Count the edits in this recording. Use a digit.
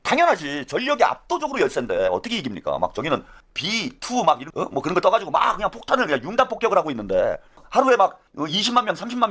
4